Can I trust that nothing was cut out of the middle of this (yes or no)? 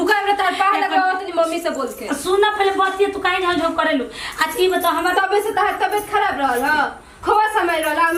yes